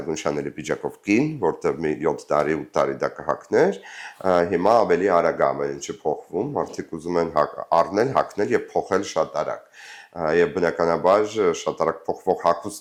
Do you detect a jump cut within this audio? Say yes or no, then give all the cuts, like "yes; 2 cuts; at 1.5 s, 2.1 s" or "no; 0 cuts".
no; 0 cuts